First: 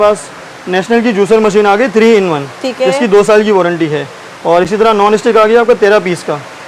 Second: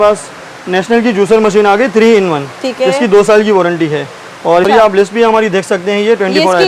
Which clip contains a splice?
second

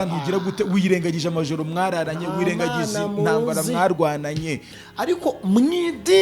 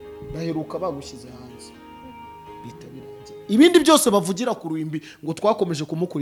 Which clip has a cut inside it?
first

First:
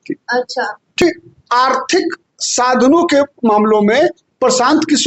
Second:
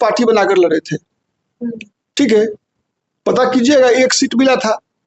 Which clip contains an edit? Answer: first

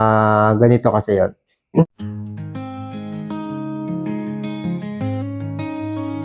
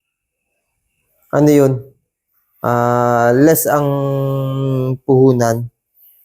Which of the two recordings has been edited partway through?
first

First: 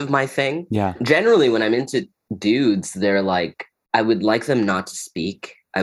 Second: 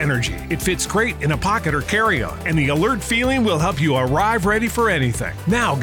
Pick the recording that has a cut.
first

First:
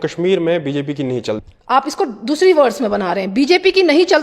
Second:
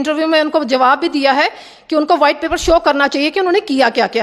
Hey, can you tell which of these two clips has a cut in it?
first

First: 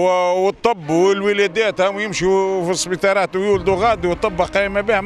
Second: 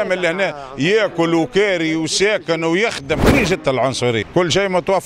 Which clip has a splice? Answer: second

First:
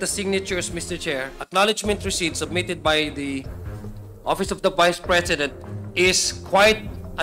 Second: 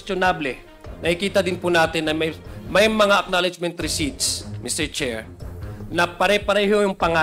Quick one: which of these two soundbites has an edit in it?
first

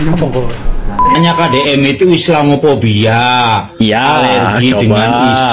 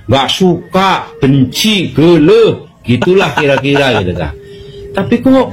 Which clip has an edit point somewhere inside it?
first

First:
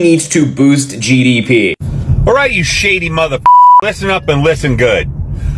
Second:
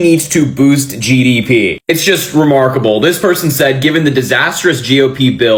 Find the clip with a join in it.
first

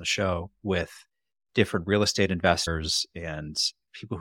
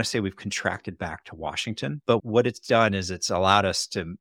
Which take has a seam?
second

